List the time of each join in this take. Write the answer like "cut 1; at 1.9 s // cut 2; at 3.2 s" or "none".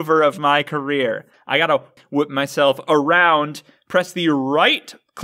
cut 1; at 1.8 s